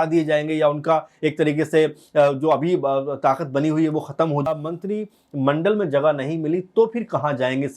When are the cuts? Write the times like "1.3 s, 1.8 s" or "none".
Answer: 4.5 s